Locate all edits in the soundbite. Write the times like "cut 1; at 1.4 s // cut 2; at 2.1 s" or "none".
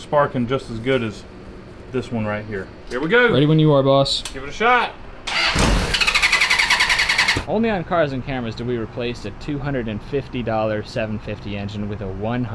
cut 1; at 2.8 s // cut 2; at 7.4 s